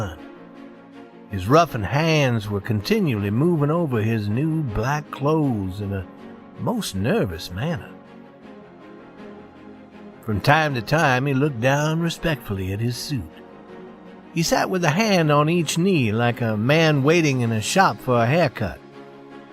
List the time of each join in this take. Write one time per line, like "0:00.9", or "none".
0:04.5